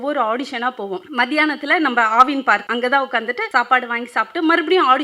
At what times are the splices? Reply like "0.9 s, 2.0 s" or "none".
1.1 s, 2.7 s, 3.4 s